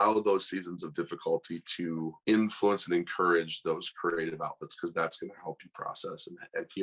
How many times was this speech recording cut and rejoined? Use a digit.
0